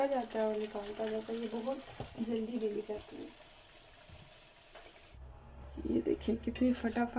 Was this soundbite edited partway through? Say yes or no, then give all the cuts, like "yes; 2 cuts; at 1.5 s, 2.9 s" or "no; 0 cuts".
yes; 1 cut; at 5.3 s